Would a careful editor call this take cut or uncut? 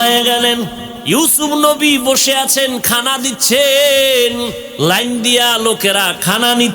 cut